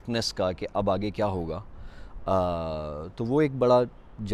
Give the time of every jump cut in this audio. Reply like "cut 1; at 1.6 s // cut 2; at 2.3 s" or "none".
none